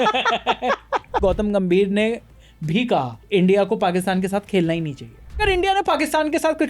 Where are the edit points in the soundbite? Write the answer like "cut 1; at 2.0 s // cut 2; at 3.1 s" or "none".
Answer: cut 1; at 1.2 s // cut 2; at 3.2 s // cut 3; at 5.4 s